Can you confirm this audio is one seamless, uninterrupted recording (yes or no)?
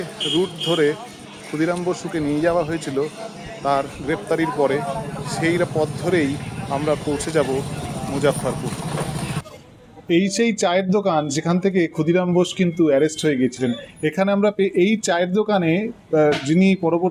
yes